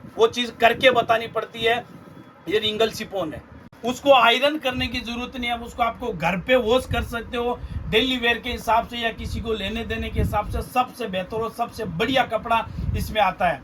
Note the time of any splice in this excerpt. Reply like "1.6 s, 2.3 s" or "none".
none